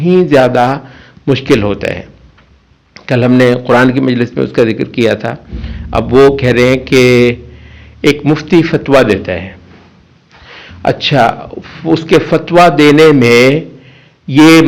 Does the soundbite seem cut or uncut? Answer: uncut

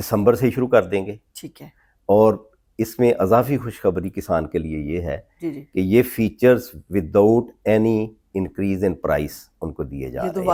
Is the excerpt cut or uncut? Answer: uncut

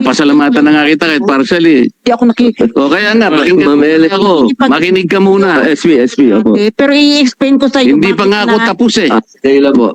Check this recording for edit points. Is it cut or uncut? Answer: uncut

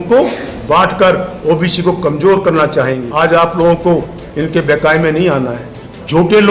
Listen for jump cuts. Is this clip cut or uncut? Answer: cut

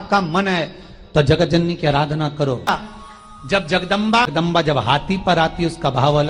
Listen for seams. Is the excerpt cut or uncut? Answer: cut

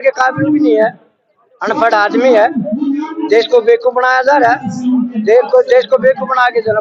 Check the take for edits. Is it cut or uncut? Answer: uncut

